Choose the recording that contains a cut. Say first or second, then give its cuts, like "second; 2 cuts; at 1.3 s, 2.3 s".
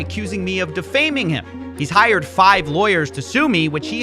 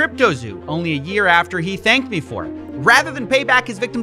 first; 1 cut; at 1.6 s